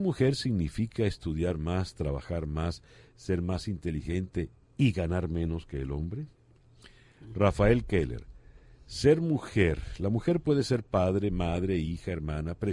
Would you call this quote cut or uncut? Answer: cut